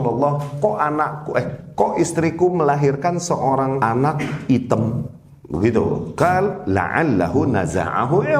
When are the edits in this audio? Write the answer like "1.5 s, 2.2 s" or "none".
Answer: 3.8 s, 6.1 s